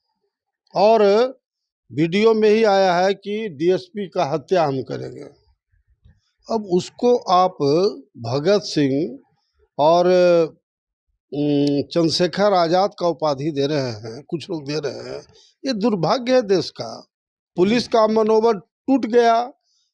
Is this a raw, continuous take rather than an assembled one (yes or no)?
no